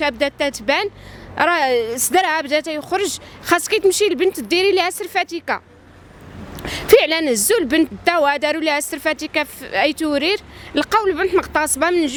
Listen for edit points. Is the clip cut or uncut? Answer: uncut